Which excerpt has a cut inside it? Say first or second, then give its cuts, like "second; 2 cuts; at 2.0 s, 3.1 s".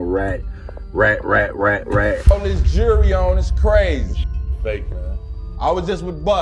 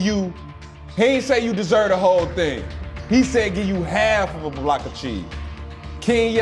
first; 1 cut; at 2.3 s